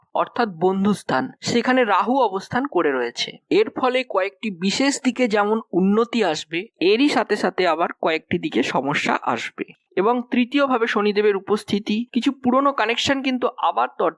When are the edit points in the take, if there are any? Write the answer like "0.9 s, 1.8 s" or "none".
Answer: 9.8 s